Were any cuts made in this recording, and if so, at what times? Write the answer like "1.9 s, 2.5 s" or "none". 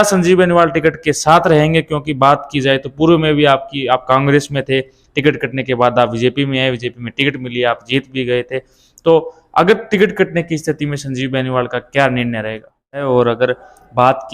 13.0 s